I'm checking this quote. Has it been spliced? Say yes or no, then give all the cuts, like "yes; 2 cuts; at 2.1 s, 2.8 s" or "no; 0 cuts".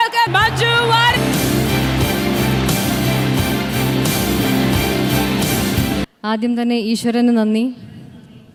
no; 0 cuts